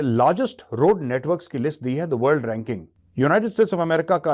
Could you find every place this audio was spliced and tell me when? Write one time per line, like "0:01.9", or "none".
0:03.0